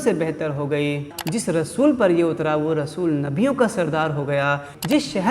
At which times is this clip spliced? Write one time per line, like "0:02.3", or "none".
0:01.1

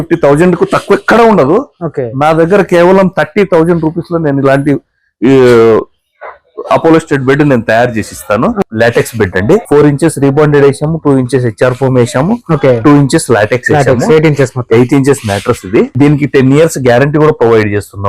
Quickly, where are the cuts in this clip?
0:08.6
0:09.6
0:15.9

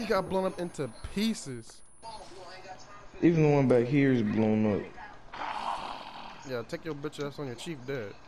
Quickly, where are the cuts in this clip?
none

